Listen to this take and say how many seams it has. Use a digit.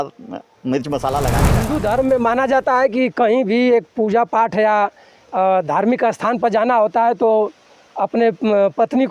1